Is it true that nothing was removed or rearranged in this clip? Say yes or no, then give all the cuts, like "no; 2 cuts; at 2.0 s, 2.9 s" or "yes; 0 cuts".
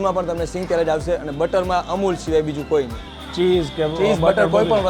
yes; 0 cuts